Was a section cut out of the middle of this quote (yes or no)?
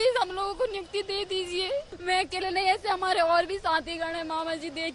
no